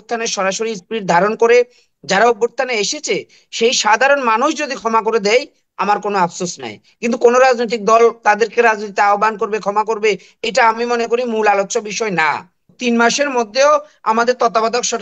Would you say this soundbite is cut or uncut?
cut